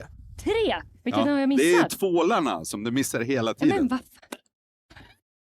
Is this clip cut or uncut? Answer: uncut